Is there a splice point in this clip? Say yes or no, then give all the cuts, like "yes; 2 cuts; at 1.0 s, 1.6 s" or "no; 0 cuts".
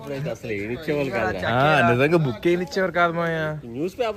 no; 0 cuts